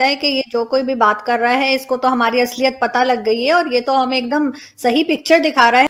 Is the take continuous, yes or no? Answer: yes